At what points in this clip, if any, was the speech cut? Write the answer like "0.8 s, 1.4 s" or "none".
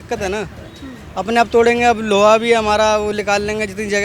none